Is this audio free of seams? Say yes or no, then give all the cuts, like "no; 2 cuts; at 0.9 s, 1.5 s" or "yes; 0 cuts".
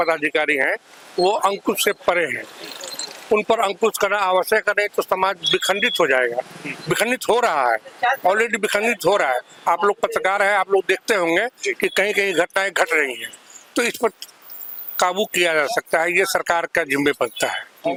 yes; 0 cuts